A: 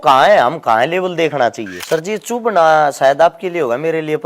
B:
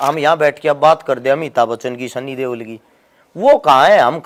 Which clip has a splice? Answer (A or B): A